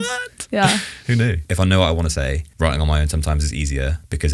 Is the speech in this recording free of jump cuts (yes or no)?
no